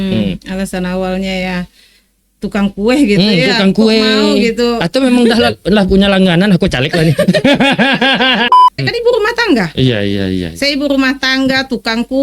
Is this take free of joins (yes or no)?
no